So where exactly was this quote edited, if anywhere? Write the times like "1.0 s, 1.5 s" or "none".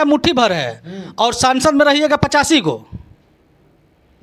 none